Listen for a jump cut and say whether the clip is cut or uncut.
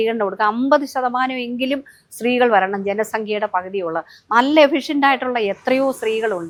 uncut